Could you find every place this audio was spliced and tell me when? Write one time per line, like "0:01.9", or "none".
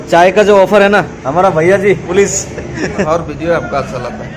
0:02.1
0:03.1